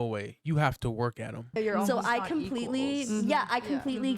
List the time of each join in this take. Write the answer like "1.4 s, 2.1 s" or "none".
1.6 s